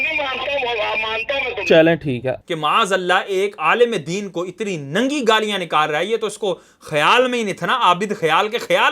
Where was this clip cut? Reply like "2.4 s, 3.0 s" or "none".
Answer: 2.3 s